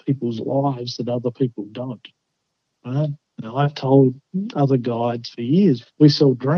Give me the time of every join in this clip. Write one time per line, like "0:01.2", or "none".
0:03.3

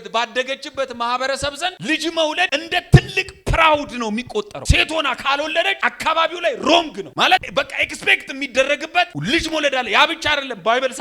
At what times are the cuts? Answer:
0:01.8
0:02.5
0:04.6
0:05.7
0:07.1

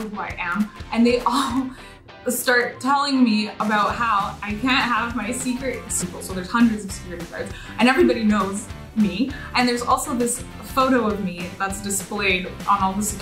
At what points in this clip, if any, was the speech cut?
0:05.9

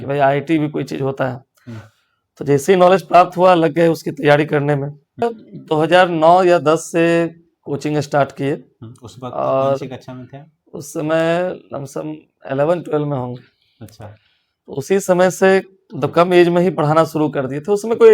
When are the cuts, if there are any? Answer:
0:05.2

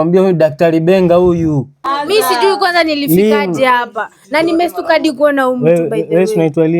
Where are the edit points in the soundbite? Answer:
0:01.8

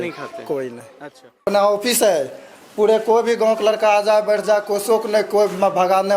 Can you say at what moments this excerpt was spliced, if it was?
0:01.4

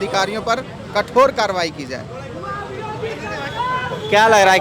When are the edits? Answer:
none

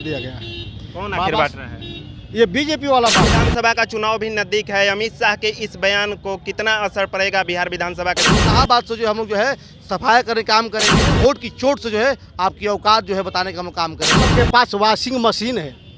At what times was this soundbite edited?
0:03.4
0:08.4
0:10.8
0:14.3

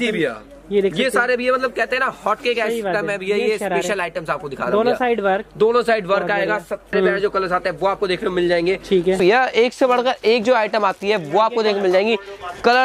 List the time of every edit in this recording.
0:06.9
0:09.2

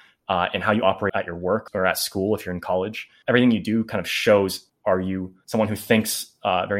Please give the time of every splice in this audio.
0:01.4
0:03.1
0:05.0

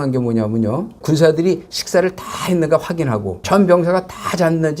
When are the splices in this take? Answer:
0:01.0
0:03.3

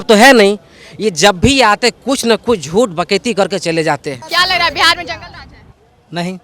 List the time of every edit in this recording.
0:04.1

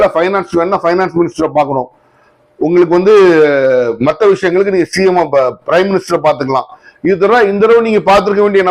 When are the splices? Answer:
none

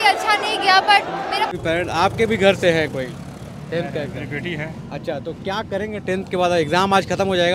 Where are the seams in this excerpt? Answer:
0:01.5

